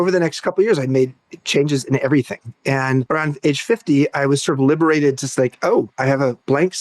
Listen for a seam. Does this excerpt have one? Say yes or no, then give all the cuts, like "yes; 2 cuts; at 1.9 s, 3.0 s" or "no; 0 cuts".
yes; 1 cut; at 3.1 s